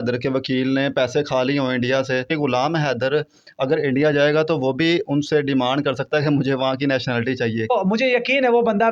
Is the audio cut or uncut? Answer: cut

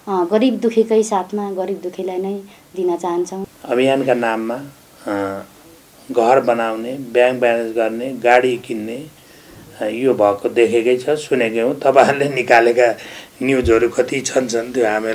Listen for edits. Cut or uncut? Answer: cut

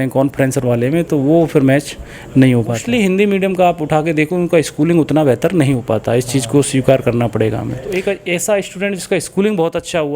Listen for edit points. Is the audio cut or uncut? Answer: cut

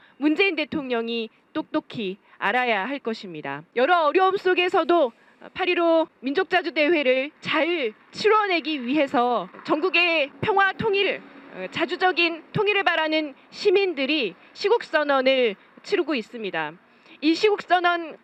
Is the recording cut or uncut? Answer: uncut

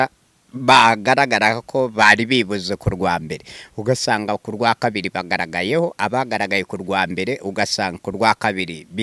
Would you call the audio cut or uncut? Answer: uncut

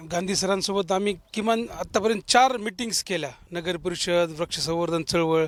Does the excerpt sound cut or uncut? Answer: uncut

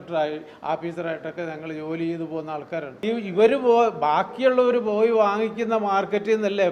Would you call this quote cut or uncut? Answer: cut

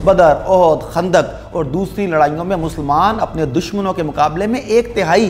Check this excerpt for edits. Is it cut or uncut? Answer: uncut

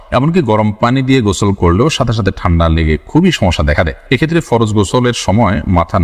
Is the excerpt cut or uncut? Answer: uncut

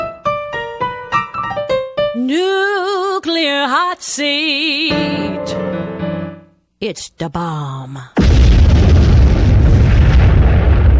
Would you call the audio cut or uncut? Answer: uncut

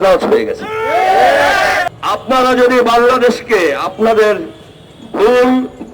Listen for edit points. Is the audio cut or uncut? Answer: cut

